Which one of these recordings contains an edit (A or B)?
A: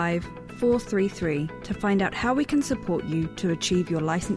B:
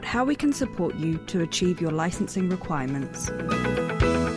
B